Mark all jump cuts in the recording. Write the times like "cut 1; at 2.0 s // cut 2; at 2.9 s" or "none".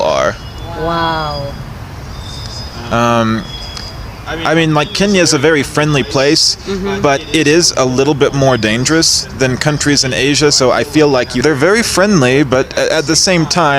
cut 1; at 11.3 s